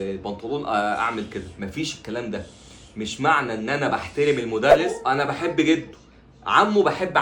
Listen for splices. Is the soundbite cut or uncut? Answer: cut